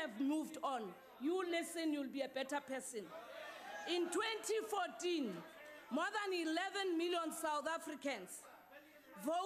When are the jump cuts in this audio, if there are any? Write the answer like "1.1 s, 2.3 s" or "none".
none